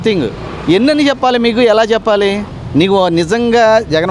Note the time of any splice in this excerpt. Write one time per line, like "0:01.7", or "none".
0:02.5